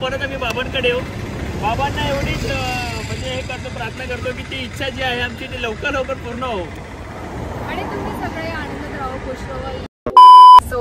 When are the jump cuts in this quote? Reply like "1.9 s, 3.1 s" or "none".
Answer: 9.9 s